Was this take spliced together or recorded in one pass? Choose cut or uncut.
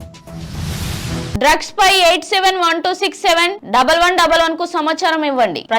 cut